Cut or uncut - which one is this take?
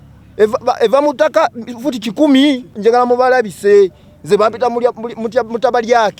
cut